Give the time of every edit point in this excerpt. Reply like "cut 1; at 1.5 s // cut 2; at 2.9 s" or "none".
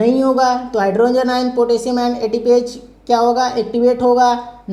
none